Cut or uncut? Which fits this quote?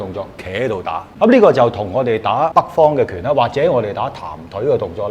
cut